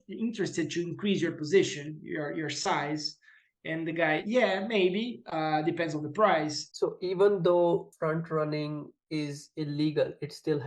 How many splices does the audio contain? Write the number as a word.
two